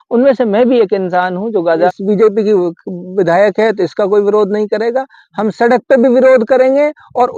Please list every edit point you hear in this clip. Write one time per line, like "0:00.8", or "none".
0:01.9